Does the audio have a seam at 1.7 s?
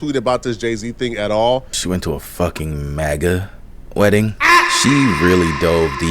yes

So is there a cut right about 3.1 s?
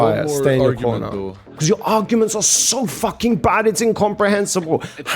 no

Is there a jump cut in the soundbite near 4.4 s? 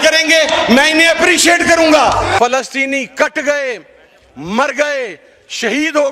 no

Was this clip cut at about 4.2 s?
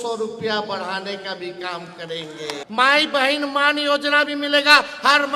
no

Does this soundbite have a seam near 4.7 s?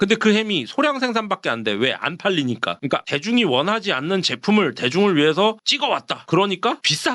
no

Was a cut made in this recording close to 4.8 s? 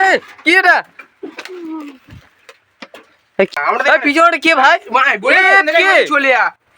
no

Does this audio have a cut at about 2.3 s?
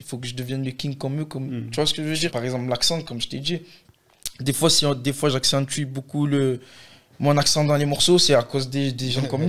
yes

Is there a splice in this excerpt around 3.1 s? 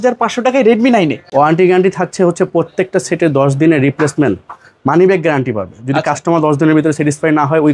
no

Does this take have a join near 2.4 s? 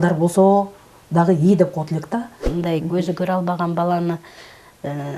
yes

